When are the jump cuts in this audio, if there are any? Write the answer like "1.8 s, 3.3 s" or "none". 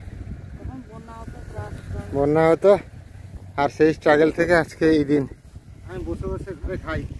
5.7 s